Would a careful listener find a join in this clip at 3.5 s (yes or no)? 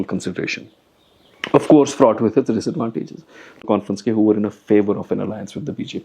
yes